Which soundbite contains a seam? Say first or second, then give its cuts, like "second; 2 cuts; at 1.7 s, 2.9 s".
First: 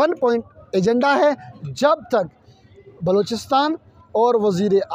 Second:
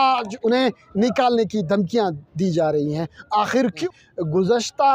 second; 1 cut; at 3.8 s